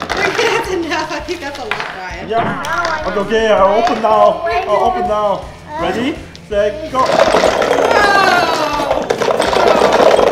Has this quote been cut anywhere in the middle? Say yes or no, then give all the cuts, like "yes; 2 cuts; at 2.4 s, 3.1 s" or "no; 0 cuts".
no; 0 cuts